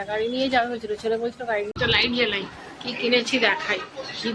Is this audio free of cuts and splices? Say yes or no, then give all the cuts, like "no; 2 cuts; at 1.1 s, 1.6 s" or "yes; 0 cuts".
no; 1 cut; at 1.7 s